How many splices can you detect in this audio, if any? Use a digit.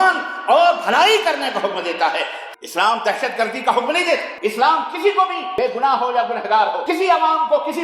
4